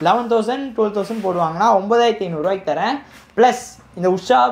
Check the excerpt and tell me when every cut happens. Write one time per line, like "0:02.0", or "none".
none